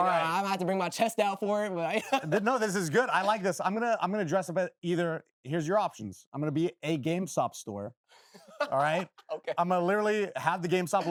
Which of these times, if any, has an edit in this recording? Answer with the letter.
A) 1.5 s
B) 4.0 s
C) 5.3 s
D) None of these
D